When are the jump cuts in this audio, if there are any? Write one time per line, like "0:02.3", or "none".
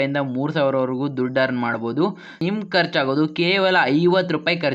0:02.4